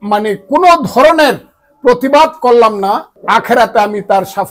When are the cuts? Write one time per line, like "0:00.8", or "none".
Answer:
0:03.1